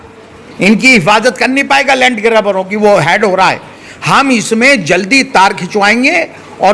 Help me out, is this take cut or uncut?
uncut